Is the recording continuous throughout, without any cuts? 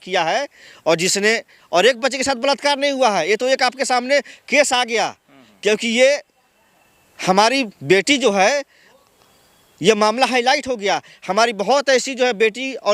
yes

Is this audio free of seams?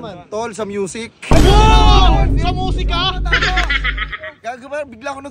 yes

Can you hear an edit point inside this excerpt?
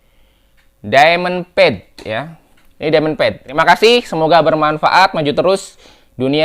yes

